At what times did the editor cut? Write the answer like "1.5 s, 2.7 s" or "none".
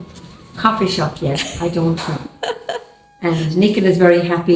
none